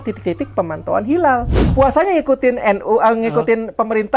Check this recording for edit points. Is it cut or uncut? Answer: cut